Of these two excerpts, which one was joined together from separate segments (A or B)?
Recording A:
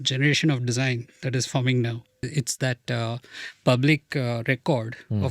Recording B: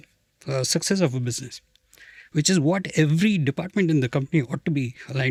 A